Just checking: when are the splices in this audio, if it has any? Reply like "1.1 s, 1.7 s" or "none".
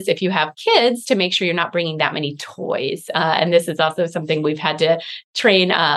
none